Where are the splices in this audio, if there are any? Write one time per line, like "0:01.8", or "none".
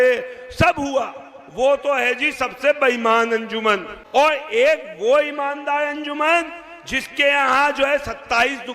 0:03.9